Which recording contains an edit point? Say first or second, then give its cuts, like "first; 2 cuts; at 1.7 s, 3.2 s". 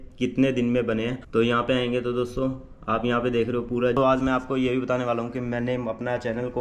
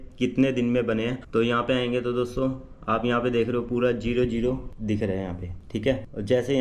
first; 1 cut; at 4.0 s